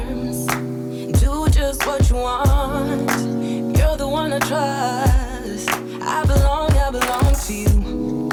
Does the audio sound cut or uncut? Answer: uncut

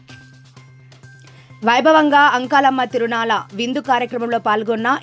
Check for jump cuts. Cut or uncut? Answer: uncut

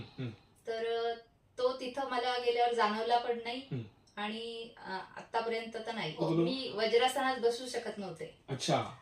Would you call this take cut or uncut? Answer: cut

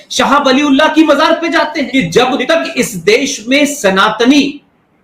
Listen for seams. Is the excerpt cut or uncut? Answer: cut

